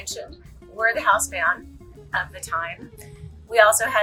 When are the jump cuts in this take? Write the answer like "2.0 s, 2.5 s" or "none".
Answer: none

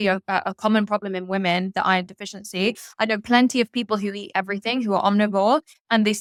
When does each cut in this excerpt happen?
none

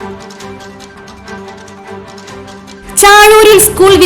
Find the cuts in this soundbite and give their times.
1.0 s, 2.5 s

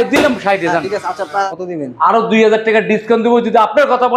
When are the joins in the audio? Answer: 1.2 s

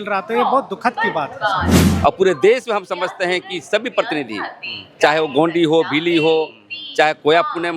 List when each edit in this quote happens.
1.8 s

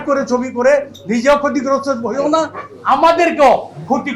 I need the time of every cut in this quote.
none

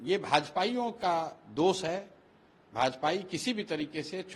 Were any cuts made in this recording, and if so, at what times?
none

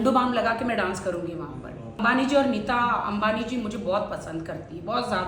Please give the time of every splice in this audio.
2.0 s

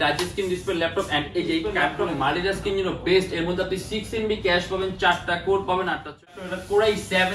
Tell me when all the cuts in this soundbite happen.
1.8 s, 6.4 s

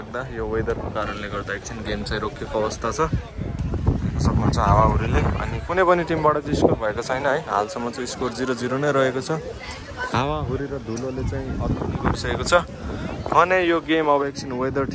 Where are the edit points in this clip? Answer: none

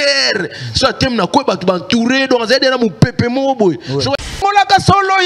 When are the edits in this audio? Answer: 4.3 s

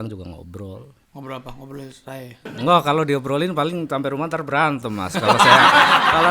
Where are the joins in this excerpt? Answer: 1.0 s, 2.5 s

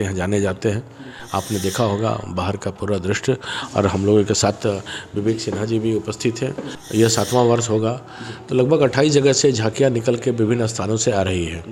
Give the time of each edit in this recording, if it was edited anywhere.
6.7 s

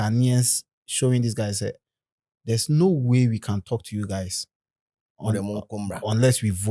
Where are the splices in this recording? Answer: none

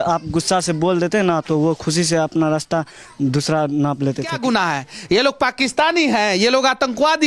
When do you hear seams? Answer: 4.4 s

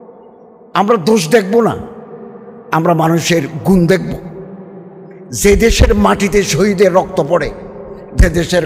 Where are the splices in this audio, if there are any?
none

